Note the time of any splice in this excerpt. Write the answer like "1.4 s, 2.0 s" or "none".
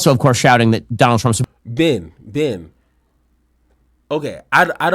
1.3 s